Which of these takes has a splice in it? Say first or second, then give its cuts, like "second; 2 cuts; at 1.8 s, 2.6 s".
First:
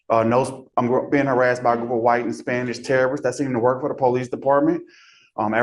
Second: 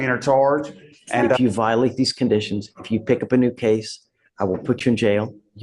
second; 1 cut; at 1.4 s